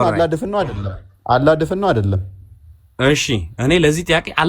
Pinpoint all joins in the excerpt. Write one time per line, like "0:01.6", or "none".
none

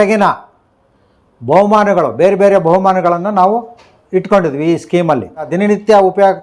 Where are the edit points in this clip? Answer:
0:05.5

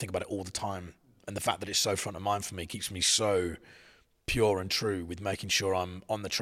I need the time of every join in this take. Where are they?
none

